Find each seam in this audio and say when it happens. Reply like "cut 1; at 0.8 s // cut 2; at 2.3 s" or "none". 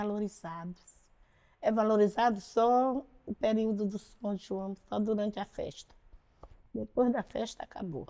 none